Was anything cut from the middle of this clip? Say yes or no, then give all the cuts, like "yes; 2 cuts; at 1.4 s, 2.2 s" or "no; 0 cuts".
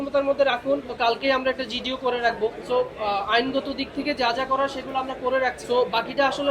yes; 3 cuts; at 0.9 s, 2.6 s, 5.6 s